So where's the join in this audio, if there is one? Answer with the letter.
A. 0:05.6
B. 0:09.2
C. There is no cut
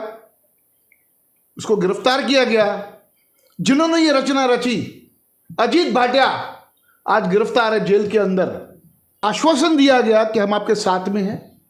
B